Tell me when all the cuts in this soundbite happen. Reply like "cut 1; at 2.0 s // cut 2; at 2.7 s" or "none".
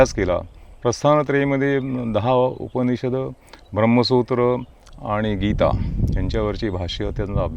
none